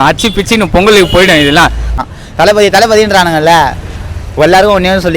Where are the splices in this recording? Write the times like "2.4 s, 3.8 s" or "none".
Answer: 1.9 s

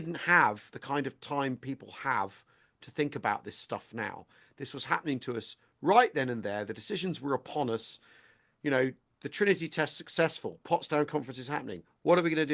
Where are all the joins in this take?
none

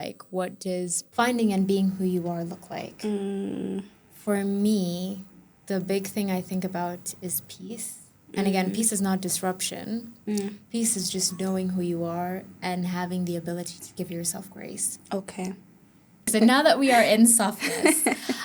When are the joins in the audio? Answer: 1.0 s, 16.3 s

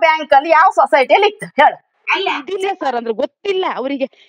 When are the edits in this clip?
2.5 s

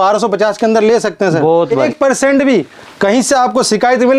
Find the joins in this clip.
1.9 s

